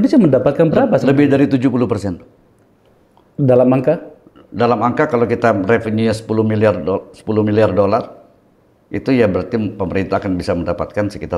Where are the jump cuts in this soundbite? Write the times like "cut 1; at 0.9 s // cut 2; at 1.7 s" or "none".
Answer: none